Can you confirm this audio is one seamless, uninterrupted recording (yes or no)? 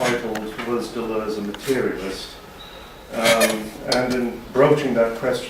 no